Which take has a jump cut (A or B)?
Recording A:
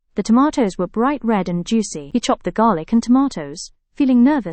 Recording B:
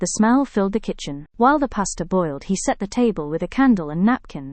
A